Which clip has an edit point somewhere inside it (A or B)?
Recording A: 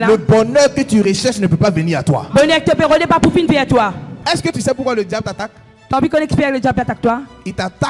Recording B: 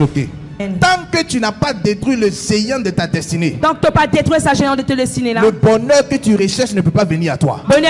A